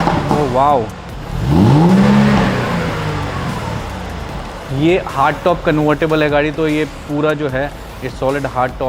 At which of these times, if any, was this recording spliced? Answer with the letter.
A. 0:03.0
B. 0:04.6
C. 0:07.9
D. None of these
B